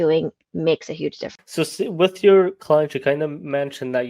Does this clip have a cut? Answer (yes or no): yes